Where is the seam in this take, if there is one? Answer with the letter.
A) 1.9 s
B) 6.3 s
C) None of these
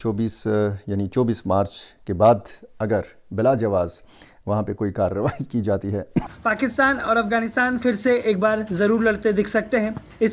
B